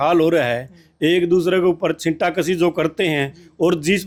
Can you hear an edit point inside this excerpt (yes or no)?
no